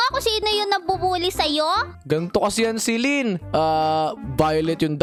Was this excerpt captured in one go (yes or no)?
yes